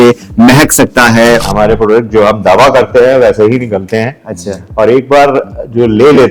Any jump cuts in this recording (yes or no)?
yes